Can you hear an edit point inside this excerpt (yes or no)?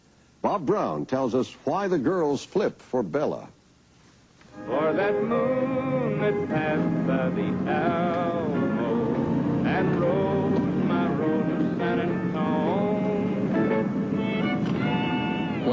yes